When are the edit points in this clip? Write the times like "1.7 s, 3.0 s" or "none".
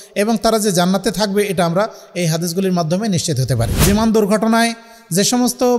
3.7 s